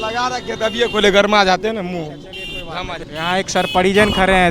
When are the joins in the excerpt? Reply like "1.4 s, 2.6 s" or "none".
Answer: 3.0 s